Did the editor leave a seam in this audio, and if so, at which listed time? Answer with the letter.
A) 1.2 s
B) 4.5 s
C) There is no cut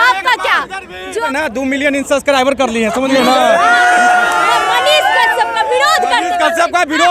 A